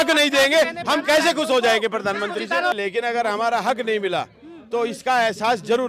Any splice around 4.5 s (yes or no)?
no